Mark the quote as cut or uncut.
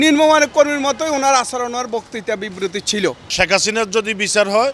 cut